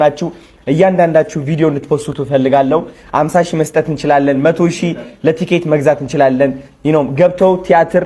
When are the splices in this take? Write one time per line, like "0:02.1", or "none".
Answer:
none